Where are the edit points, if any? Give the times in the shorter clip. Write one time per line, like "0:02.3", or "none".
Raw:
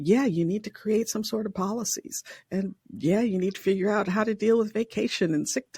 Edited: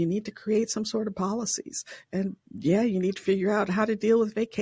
none